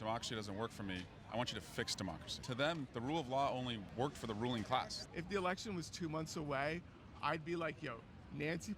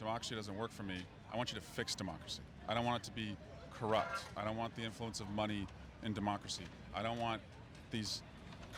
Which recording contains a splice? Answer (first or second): first